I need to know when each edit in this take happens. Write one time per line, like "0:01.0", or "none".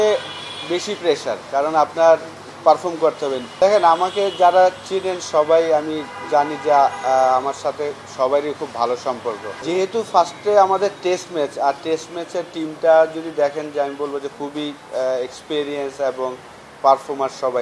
0:03.4
0:09.5
0:14.7